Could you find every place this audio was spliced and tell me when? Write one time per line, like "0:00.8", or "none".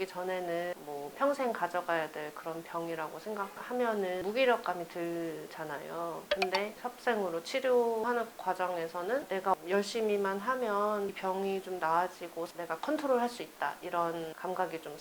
0:00.8
0:04.2
0:08.0
0:12.5